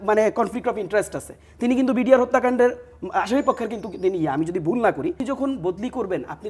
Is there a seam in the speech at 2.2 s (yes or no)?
no